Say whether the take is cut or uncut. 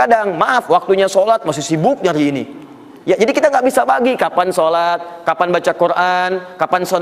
uncut